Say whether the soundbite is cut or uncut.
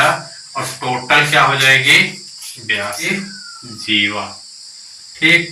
cut